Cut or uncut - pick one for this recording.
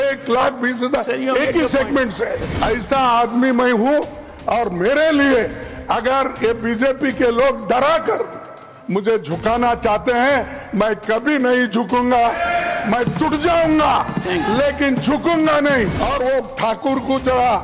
cut